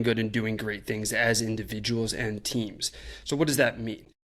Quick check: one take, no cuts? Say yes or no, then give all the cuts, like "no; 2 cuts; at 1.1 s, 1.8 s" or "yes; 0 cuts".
yes; 0 cuts